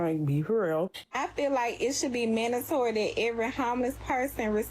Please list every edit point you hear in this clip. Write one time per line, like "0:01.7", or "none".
0:01.0